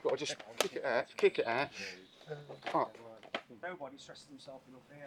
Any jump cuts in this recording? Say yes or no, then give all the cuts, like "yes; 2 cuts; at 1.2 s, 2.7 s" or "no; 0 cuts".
yes; 1 cut; at 3.5 s